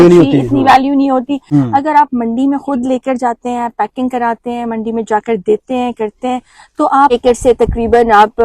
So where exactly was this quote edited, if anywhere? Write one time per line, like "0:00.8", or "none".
0:01.4
0:07.1